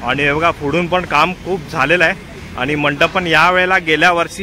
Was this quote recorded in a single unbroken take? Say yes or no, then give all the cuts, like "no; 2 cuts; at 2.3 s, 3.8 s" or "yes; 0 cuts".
yes; 0 cuts